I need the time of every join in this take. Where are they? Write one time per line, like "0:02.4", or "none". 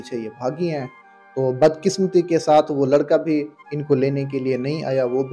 none